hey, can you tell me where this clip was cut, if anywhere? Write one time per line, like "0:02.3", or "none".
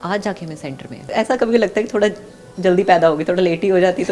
0:01.1